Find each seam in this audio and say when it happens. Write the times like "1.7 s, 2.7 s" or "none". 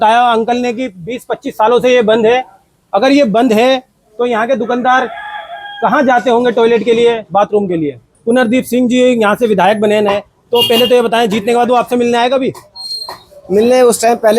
8.1 s